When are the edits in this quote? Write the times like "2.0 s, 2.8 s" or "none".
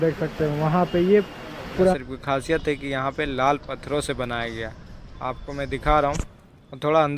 1.9 s

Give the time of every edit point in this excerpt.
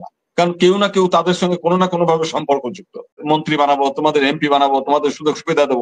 3.2 s

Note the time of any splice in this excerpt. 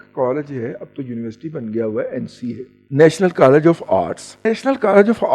2.7 s, 4.4 s

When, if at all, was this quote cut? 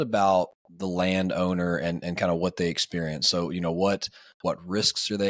none

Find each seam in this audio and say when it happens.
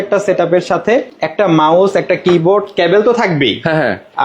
1.2 s

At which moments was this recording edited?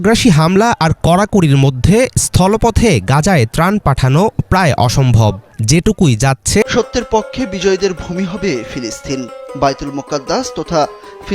6.6 s

